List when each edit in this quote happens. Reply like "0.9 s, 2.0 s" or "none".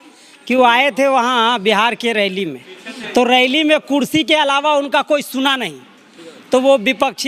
none